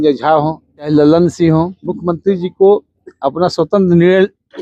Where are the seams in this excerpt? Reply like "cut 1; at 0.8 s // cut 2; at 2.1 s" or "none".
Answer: cut 1; at 0.9 s // cut 2; at 1.9 s